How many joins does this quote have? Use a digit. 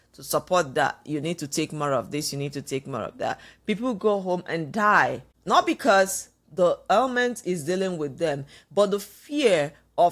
1